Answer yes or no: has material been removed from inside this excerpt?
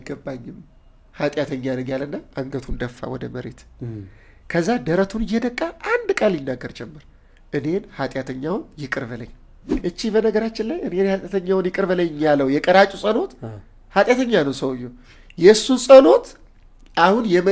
yes